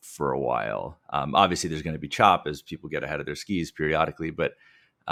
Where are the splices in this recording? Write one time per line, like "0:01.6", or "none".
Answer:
none